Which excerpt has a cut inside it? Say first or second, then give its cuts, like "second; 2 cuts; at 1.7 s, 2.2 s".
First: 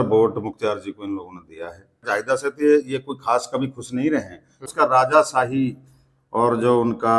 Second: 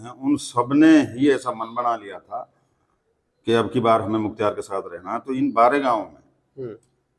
first; 2 cuts; at 2.0 s, 4.6 s